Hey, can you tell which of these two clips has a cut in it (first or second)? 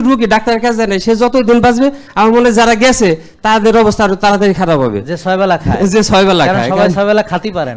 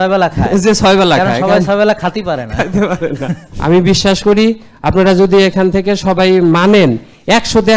second